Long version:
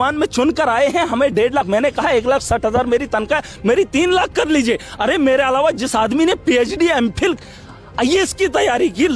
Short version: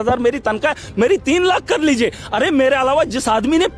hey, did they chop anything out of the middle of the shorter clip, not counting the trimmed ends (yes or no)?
no